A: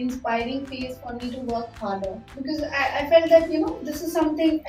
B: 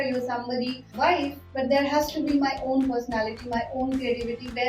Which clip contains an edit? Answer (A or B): B